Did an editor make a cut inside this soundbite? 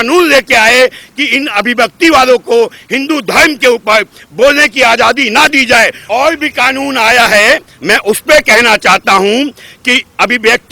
yes; 1 cut; at 6.0 s

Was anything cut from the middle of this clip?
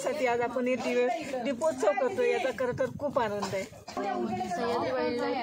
yes; 1 cut; at 4.0 s

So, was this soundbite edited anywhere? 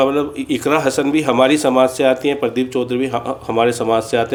no; 0 cuts

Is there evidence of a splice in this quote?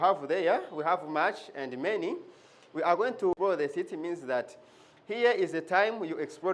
yes; 1 cut; at 3.3 s

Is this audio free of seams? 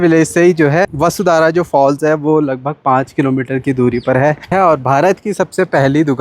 no; 2 cuts; at 0.9 s, 4.5 s

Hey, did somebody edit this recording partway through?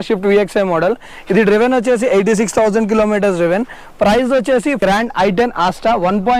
yes; 1 cut; at 4.8 s

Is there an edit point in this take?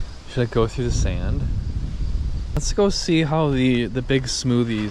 yes; 1 cut; at 2.7 s

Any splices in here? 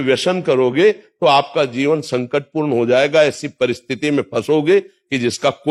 no; 0 cuts

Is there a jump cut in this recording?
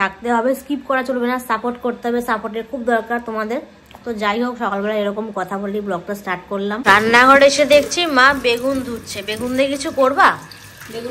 yes; 1 cut; at 6.8 s

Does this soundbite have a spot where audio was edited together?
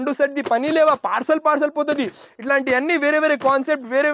no; 0 cuts

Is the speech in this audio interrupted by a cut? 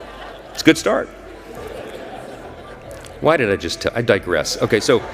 no; 0 cuts

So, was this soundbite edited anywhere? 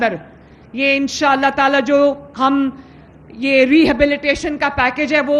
no; 0 cuts

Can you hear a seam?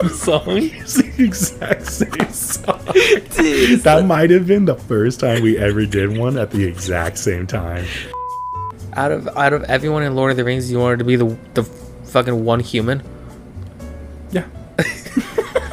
yes; 1 cut; at 8.2 s

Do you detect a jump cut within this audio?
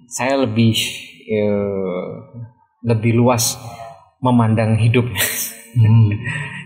no; 0 cuts

